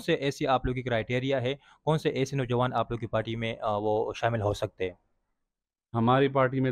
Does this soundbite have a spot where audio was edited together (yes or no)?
no